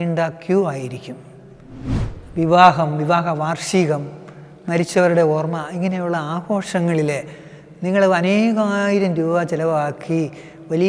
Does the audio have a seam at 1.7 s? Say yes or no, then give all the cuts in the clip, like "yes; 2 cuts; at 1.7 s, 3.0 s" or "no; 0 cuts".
yes; 1 cut; at 1.7 s